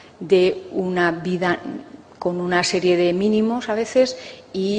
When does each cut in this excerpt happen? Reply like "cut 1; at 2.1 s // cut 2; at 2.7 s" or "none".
cut 1; at 3.9 s